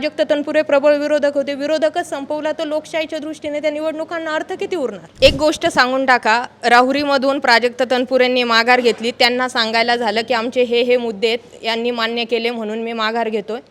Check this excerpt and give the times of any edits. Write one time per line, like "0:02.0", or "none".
0:05.0